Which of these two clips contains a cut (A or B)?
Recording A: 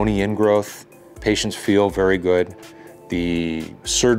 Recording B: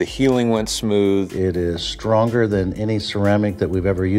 B